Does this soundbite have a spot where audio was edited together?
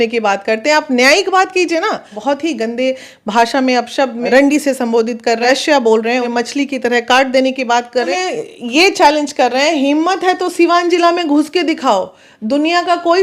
yes; 5 cuts; at 2.1 s, 4.2 s, 5.4 s, 6.3 s, 8.1 s

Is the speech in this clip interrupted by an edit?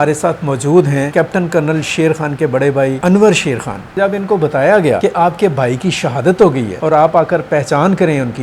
yes; 5 cuts; at 1.1 s, 3.0 s, 4.0 s, 5.0 s, 6.7 s

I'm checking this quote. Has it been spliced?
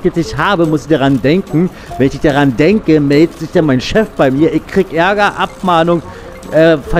no; 0 cuts

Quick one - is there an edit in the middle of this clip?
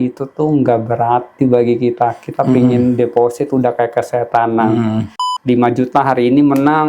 yes; 1 cut; at 5.3 s

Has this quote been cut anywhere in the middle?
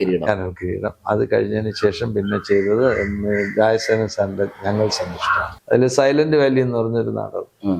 yes; 1 cut; at 5.5 s

